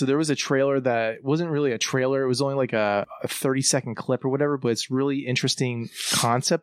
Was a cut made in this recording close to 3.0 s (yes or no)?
yes